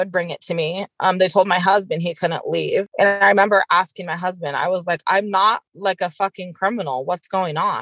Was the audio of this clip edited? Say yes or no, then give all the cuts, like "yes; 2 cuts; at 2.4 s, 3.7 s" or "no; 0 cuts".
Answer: yes; 2 cuts; at 2.9 s, 5.7 s